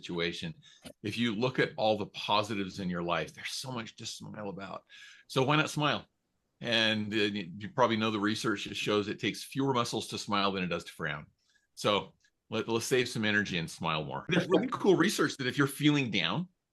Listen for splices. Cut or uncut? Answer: cut